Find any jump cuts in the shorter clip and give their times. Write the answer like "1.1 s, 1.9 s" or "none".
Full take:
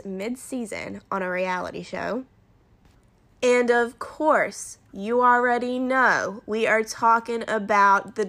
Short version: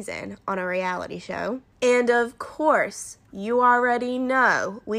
1.7 s